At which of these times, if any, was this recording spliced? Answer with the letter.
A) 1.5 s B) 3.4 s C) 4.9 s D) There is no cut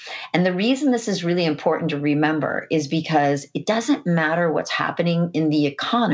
D